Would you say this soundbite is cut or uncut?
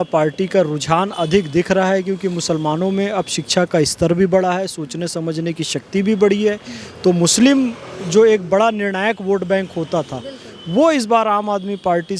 uncut